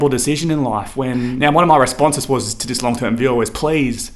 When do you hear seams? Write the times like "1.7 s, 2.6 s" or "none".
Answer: 1.4 s